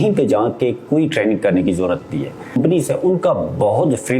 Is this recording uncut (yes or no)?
no